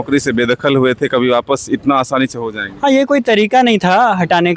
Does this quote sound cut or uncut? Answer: uncut